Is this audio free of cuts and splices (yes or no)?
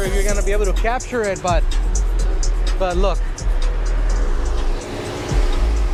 yes